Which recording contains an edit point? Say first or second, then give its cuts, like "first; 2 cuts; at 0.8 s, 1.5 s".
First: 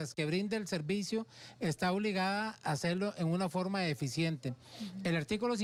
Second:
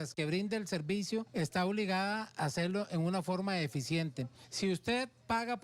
second; 2 cuts; at 1.3 s, 4.4 s